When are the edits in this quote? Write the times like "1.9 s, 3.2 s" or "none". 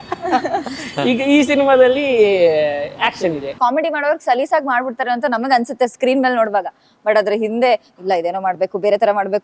3.5 s